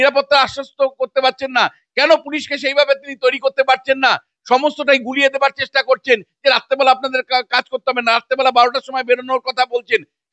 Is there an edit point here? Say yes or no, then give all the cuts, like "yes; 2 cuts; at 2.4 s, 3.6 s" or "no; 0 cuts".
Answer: no; 0 cuts